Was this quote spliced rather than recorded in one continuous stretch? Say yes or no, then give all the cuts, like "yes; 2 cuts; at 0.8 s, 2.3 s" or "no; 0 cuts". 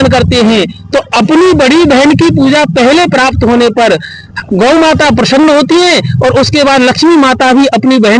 no; 0 cuts